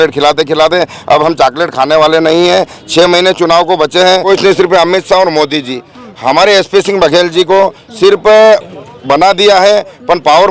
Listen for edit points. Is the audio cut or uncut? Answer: cut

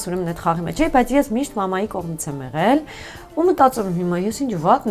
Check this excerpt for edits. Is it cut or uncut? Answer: uncut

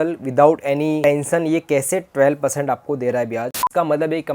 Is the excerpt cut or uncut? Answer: cut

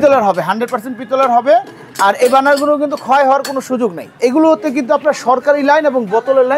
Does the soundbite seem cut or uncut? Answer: cut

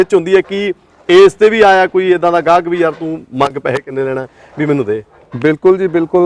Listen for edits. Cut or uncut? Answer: uncut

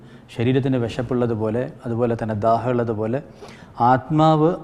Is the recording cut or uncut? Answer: uncut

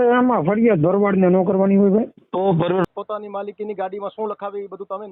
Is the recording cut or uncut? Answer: cut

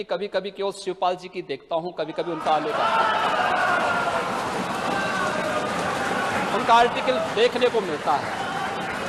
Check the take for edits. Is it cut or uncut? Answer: uncut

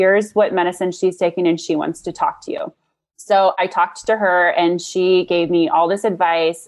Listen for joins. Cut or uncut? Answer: uncut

